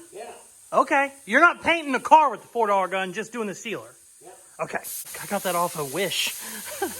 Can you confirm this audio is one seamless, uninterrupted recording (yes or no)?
no